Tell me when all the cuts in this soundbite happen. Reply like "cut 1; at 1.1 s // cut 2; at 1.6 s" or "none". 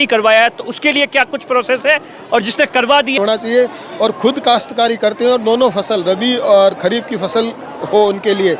cut 1; at 3.1 s